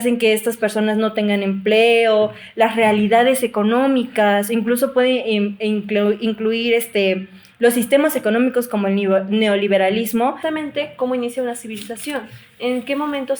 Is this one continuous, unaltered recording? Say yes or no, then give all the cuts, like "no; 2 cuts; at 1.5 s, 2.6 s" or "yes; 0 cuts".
no; 1 cut; at 10.4 s